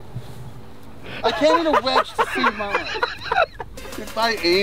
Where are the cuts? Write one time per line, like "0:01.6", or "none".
0:01.1